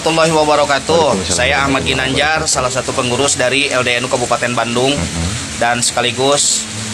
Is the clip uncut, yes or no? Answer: yes